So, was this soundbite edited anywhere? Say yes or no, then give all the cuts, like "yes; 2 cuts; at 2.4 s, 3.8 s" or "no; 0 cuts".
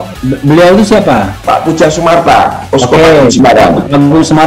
no; 0 cuts